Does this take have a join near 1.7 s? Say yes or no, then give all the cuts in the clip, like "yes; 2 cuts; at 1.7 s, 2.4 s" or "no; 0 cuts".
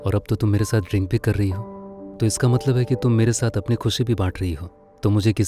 no; 0 cuts